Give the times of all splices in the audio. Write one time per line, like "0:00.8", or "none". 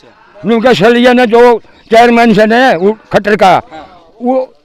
none